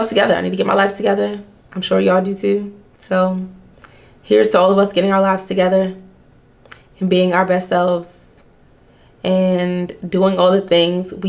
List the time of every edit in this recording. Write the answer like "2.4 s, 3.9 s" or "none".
none